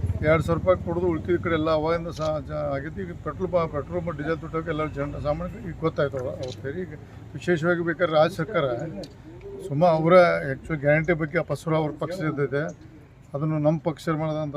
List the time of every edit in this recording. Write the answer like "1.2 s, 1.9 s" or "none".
10.9 s